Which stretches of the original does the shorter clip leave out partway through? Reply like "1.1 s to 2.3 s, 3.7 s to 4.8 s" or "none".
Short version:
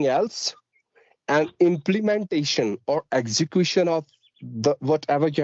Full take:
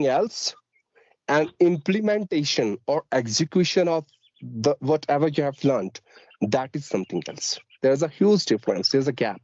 none